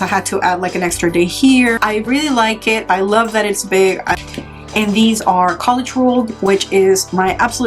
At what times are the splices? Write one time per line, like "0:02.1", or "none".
0:01.8
0:04.2